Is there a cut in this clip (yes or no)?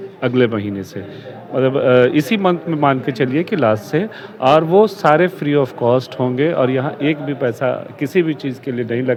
no